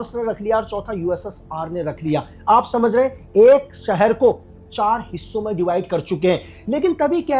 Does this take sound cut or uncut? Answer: uncut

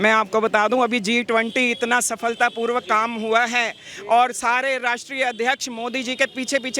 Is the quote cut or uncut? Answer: uncut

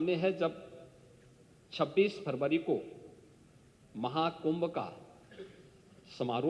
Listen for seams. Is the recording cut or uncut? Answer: uncut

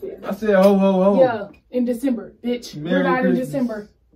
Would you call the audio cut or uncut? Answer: uncut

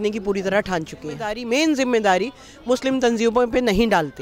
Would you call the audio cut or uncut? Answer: cut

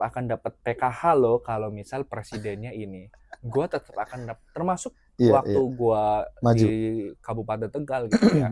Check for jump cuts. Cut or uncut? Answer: uncut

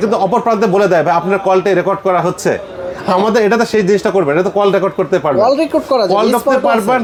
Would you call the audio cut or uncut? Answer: uncut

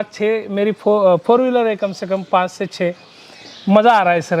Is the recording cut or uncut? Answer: uncut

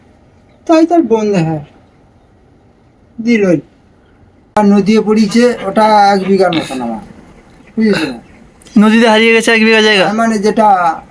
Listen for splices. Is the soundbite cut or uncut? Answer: cut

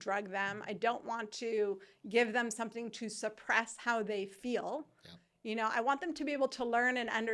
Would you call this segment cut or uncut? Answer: uncut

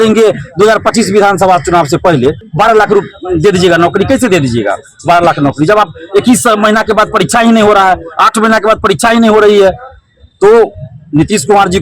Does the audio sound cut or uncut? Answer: cut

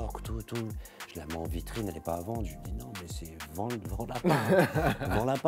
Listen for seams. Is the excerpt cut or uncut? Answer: uncut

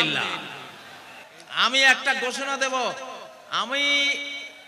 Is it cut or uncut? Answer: cut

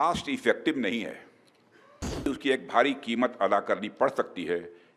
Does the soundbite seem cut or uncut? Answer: cut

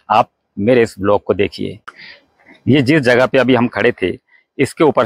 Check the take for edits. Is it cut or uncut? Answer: uncut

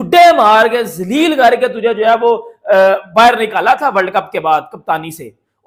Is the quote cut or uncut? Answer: uncut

